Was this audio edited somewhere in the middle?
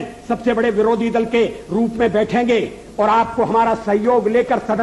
no; 0 cuts

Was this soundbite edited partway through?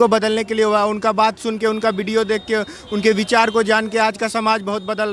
no; 0 cuts

